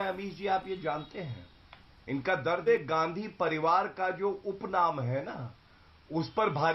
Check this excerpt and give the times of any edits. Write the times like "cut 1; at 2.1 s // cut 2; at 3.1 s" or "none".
cut 1; at 2.7 s